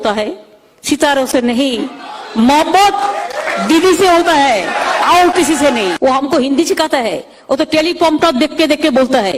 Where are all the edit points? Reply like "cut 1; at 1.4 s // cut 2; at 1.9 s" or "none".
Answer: cut 1; at 6.0 s